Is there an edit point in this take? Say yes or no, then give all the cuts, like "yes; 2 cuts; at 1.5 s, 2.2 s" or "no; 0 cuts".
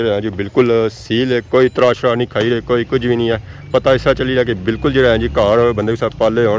no; 0 cuts